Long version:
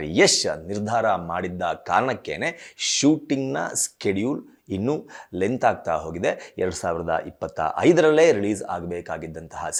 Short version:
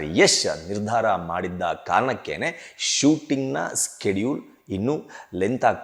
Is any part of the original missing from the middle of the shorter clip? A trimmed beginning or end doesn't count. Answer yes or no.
no